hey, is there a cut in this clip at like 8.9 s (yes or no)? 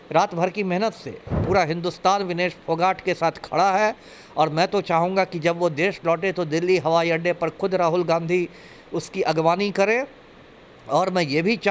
no